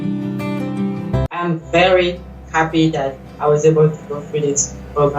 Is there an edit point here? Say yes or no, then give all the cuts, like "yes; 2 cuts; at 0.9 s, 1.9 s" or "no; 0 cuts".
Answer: yes; 1 cut; at 1.5 s